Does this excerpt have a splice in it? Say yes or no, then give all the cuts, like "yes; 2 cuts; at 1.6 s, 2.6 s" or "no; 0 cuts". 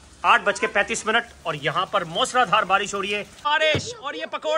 yes; 1 cut; at 3.4 s